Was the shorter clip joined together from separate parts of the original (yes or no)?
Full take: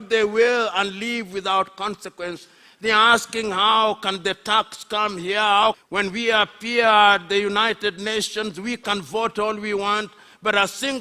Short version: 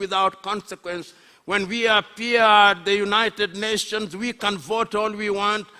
yes